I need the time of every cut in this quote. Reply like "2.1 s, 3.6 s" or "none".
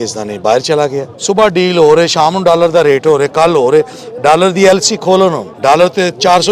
1.1 s, 5.5 s

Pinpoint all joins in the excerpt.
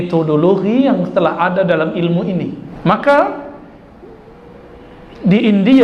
2.7 s

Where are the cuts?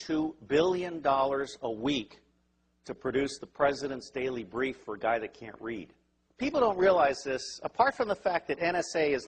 8.1 s

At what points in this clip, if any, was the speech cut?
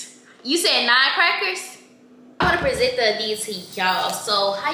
2.4 s

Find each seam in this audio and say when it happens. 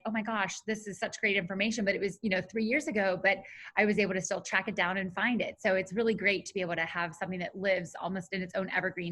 none

